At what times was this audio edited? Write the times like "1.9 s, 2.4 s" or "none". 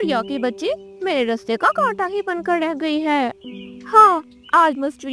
3.5 s